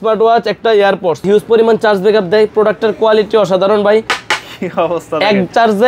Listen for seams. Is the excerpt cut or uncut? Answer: cut